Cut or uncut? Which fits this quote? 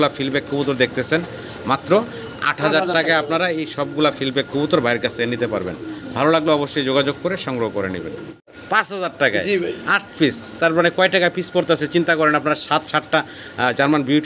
cut